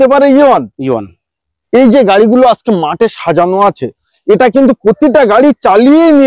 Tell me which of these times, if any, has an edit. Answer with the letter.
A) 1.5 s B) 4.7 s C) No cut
A